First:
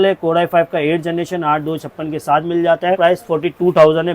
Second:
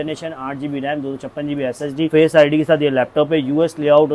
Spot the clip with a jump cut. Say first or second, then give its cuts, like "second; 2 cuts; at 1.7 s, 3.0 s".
first; 1 cut; at 3.0 s